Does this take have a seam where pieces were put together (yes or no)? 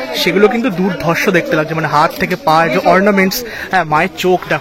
no